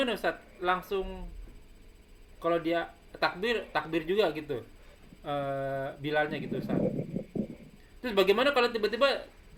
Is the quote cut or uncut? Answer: uncut